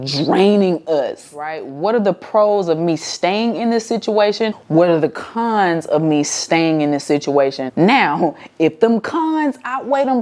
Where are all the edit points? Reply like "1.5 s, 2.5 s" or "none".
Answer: 1.6 s, 4.6 s, 7.6 s

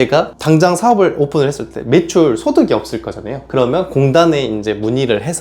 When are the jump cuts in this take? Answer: none

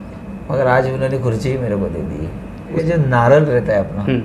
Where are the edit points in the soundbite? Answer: 2.8 s

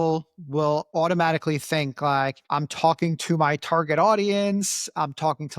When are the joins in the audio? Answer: 0.9 s, 2.4 s

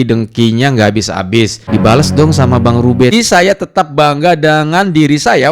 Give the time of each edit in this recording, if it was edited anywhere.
1.6 s, 3.1 s

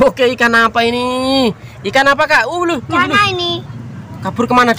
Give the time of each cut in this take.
none

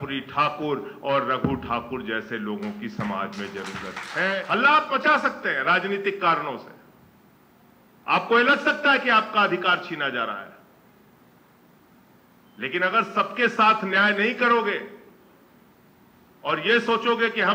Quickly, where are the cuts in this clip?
4.4 s

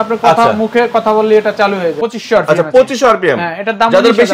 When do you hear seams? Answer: 2.0 s

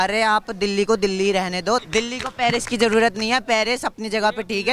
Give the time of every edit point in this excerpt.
1.8 s

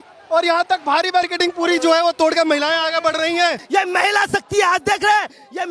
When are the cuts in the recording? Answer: 3.6 s

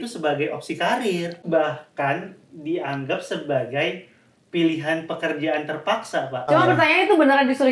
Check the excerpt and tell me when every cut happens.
1.4 s, 6.5 s

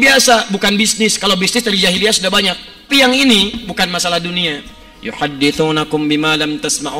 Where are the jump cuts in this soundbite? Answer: 2.9 s

